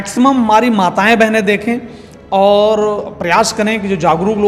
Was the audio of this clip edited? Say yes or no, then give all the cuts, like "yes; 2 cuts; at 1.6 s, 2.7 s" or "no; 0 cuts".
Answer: no; 0 cuts